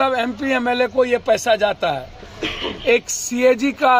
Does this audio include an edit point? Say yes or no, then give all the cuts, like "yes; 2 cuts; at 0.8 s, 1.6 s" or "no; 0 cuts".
no; 0 cuts